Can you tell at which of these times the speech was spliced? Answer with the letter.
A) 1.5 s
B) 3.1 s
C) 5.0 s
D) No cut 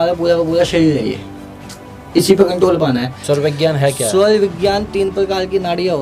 B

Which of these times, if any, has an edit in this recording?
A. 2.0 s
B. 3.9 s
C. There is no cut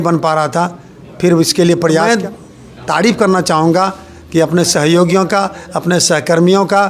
A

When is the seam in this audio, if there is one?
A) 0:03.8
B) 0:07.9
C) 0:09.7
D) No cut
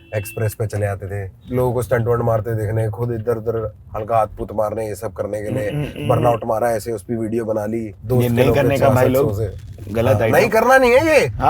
B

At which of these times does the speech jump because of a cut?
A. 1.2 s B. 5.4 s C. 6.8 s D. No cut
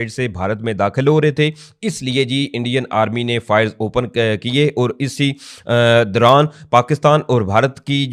D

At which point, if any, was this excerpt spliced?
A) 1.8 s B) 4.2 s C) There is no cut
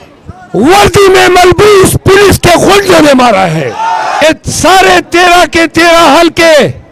B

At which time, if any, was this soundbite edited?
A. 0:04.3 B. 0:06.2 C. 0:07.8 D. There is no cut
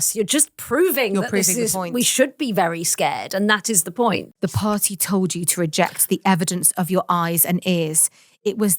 A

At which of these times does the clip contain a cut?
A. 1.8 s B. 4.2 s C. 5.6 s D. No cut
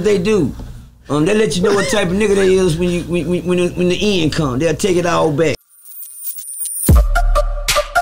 C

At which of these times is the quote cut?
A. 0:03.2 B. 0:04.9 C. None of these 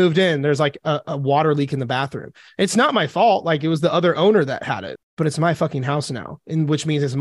B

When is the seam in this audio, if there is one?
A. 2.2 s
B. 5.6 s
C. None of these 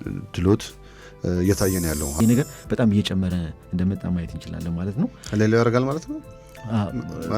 A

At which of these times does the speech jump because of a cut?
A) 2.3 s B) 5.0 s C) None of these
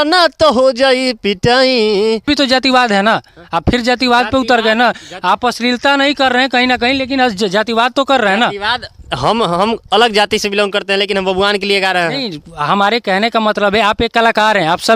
A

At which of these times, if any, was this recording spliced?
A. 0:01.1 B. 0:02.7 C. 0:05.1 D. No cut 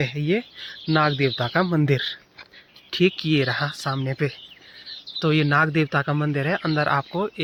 D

